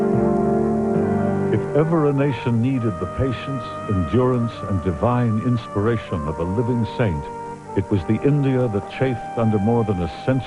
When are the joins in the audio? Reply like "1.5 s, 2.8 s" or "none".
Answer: none